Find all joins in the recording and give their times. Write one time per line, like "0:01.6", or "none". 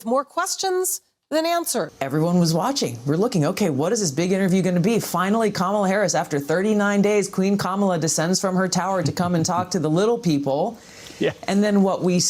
0:01.9